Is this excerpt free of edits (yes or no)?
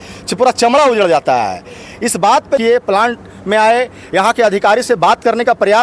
no